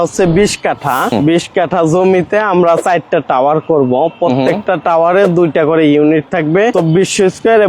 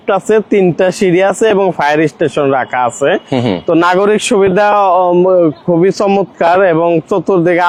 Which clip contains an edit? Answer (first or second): first